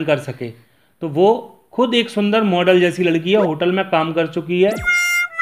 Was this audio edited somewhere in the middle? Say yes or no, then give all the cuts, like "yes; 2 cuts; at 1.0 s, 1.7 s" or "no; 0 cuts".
no; 0 cuts